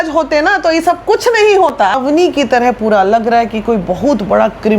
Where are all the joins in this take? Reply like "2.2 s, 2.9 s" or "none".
1.9 s